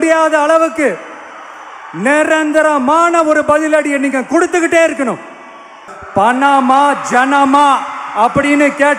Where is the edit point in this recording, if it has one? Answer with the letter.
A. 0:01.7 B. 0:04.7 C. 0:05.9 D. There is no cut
C